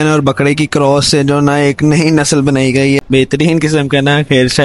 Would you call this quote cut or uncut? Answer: cut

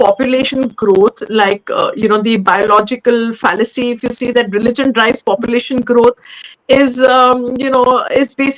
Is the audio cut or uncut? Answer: uncut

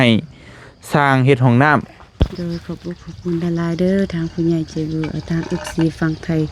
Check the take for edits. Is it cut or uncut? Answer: cut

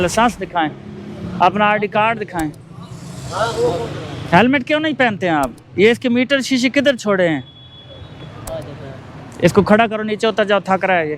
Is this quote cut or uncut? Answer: uncut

